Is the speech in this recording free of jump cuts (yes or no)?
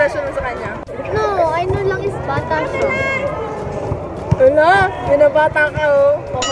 yes